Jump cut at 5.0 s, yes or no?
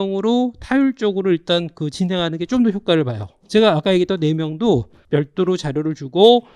yes